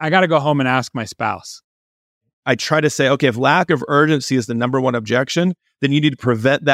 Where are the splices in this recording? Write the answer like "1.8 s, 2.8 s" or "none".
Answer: 2.3 s